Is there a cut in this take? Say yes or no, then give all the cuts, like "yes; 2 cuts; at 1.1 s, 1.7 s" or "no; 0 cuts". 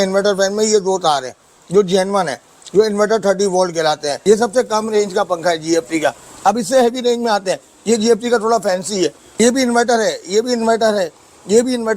yes; 2 cuts; at 4.1 s, 9.2 s